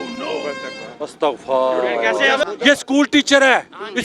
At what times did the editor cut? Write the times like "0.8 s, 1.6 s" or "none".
2.4 s

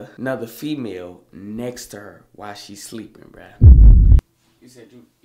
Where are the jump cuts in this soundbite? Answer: 4.2 s

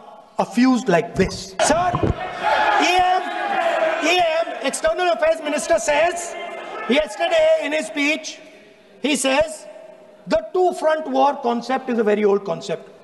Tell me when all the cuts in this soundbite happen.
1.6 s

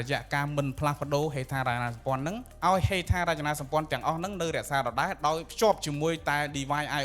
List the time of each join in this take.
2.5 s, 5.5 s

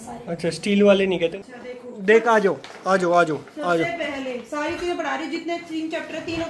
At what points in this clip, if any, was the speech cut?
1.3 s

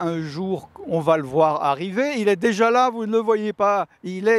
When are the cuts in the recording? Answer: none

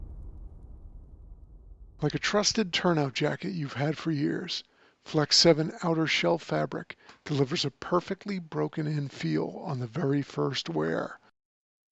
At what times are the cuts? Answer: 1.9 s

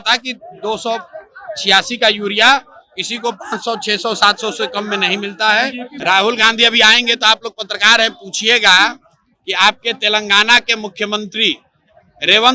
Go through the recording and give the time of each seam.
5.9 s

